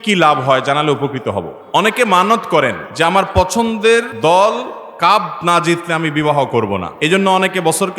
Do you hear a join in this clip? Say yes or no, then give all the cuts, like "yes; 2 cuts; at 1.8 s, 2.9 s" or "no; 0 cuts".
yes; 4 cuts; at 1.6 s, 2.8 s, 4.1 s, 6.9 s